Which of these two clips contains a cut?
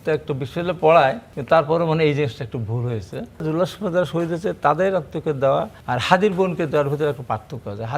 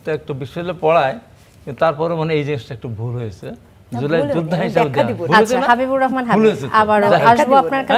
first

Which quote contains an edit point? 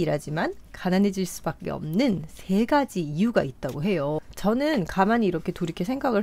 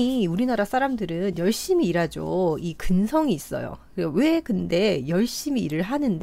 first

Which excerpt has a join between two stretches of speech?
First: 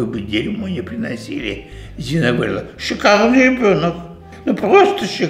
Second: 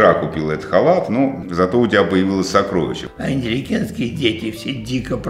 second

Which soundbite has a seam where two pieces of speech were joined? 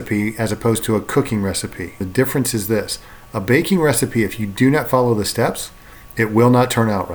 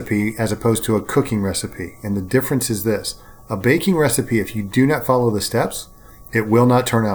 first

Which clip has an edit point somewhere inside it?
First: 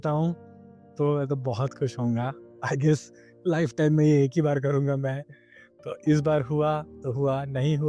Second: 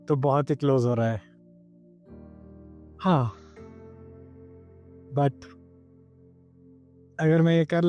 first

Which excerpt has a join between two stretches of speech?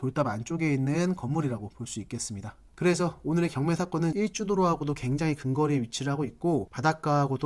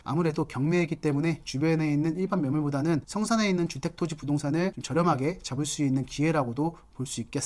first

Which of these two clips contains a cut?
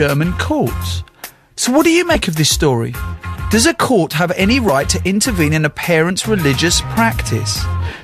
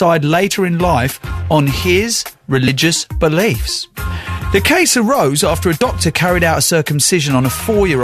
first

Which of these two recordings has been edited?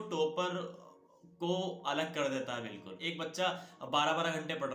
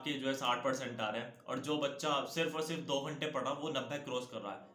first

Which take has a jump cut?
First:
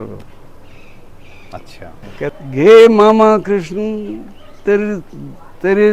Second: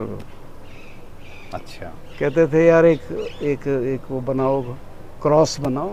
first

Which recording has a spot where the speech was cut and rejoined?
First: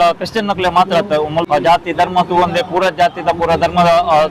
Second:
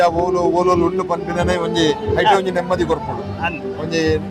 first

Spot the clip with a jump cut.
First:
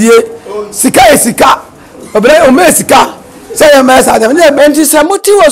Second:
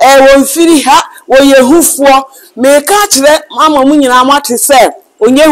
first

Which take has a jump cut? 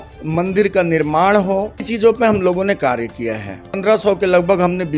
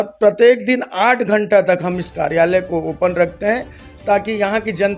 first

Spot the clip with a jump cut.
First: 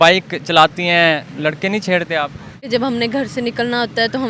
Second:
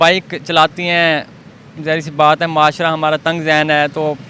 first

